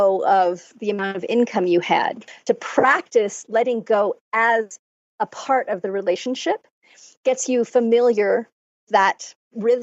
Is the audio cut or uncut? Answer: cut